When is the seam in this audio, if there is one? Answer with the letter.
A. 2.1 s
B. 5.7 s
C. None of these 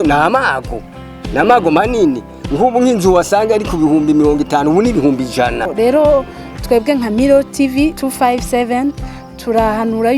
B